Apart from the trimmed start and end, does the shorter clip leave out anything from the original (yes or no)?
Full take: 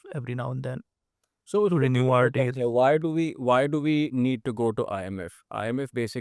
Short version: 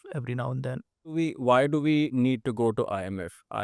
yes